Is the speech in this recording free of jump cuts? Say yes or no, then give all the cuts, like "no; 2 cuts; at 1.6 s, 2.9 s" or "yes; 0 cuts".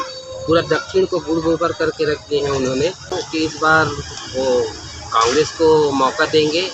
no; 1 cut; at 3.2 s